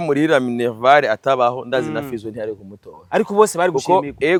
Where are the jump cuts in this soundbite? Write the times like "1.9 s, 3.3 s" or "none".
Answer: none